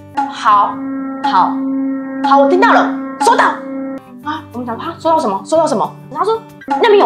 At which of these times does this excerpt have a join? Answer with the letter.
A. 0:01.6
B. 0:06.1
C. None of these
B